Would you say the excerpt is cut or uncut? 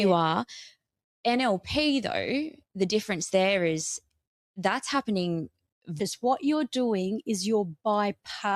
cut